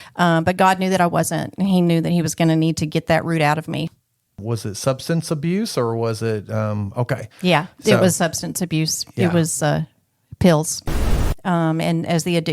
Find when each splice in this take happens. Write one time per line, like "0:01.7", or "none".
0:03.9
0:11.2